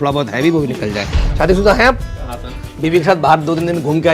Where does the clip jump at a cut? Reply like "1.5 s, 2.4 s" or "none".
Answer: 1.2 s